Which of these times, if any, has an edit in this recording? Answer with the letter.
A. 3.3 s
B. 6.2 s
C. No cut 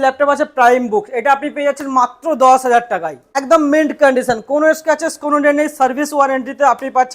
A